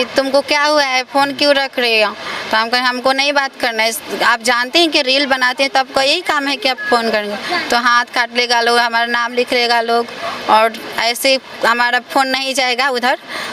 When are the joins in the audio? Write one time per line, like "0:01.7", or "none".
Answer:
none

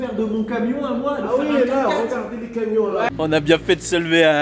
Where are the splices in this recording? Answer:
0:03.1

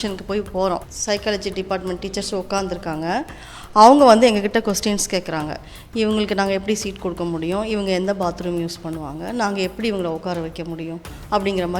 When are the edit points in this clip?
0:00.9

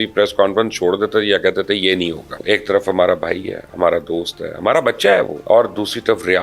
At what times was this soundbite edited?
0:02.4
0:05.4

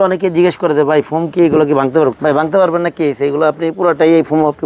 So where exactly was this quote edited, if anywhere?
0:02.2

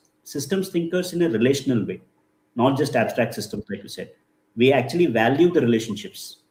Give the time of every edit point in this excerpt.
none

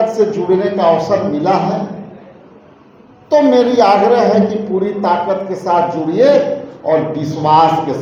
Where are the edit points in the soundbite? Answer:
none

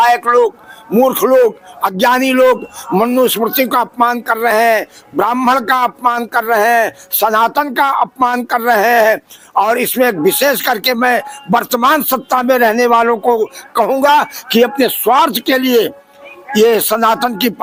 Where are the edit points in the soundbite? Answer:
none

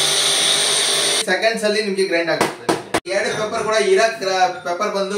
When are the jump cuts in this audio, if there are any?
0:01.2
0:03.0

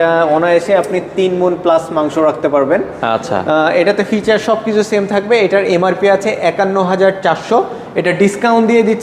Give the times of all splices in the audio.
none

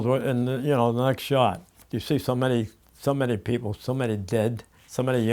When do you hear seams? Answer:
0:01.7

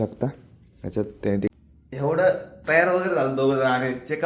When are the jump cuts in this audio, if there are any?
0:01.5

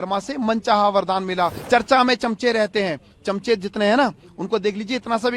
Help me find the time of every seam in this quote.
0:01.6

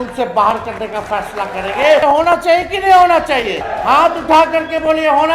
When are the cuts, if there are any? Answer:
0:02.0
0:03.7

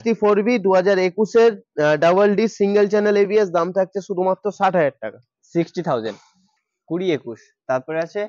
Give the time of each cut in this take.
0:06.5

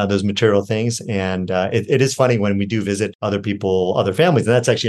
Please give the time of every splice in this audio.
0:03.2

